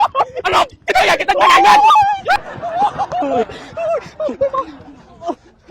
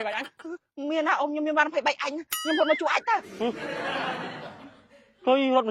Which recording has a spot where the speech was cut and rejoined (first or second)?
first